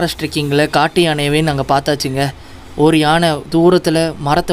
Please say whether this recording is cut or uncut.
uncut